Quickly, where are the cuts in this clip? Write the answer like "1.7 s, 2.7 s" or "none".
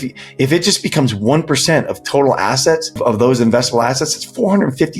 3.0 s